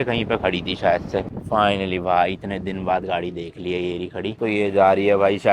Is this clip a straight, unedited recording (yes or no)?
yes